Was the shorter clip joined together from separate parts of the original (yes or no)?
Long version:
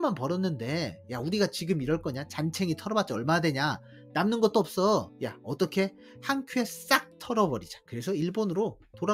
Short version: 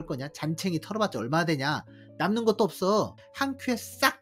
yes